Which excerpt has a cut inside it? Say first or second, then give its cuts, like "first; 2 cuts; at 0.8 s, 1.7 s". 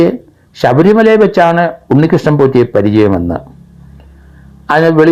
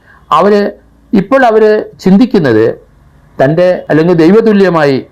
second; 1 cut; at 3.8 s